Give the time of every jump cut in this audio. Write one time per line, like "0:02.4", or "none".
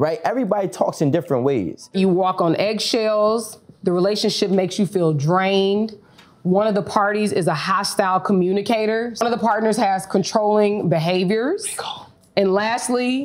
0:01.9
0:09.2